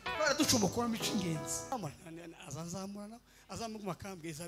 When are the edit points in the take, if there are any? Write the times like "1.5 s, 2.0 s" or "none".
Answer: 1.7 s